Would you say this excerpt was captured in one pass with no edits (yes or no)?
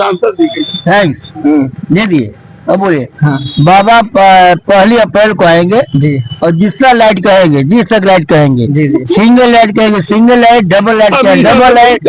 yes